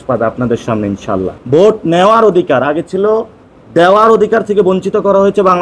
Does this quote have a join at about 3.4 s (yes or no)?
no